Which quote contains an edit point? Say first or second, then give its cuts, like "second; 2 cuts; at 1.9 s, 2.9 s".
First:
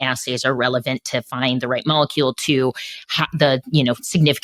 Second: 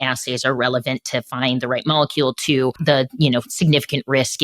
second; 1 cut; at 2.8 s